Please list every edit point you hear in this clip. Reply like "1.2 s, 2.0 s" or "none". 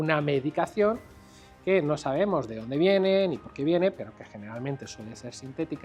none